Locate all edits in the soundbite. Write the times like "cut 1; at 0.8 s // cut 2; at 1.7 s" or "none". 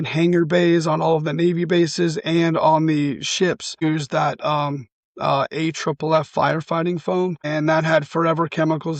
cut 1; at 3.8 s // cut 2; at 7.4 s